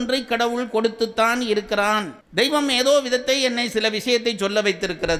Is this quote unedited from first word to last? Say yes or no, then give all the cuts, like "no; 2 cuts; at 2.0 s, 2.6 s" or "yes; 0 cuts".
no; 1 cut; at 2.2 s